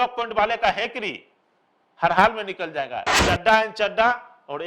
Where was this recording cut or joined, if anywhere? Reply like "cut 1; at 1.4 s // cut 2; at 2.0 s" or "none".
cut 1; at 3.1 s